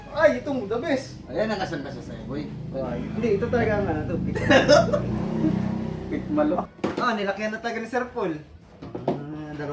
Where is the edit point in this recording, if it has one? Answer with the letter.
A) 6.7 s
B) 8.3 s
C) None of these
A